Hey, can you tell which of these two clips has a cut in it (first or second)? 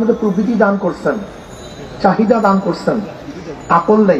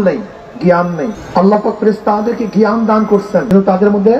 second